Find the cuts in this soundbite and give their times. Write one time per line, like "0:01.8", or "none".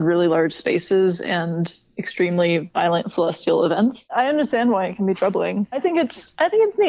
0:04.0
0:05.8